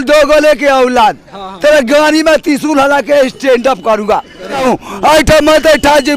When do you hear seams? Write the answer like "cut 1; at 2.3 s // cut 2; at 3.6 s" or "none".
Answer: cut 1; at 4.6 s